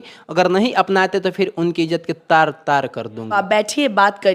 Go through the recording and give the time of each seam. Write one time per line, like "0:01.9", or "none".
0:03.4

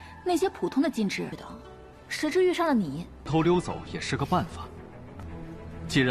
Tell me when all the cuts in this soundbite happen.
none

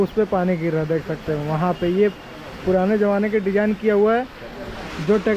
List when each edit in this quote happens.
none

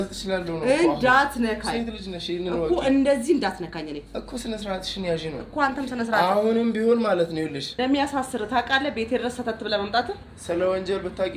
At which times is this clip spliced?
0:07.7

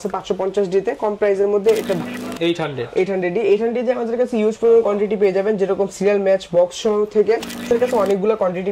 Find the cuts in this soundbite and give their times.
0:02.0
0:07.7

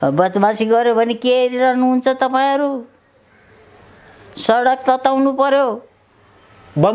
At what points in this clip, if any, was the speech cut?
none

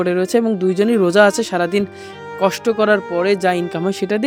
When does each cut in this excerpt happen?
none

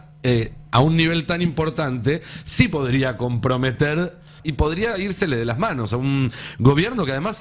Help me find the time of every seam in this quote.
0:04.4

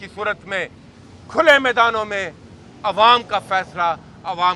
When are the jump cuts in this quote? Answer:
none

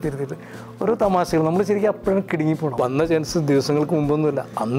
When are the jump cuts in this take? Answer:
0:02.7

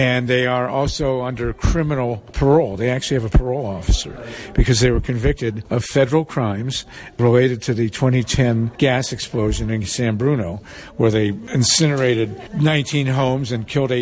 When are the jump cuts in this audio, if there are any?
0:02.3
0:05.6
0:07.2
0:08.7
0:11.4
0:12.4

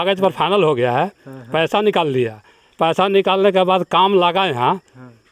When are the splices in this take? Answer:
none

